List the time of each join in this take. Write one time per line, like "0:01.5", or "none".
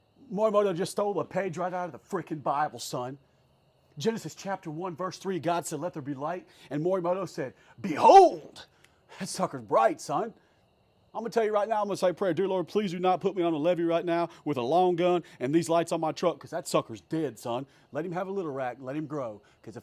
none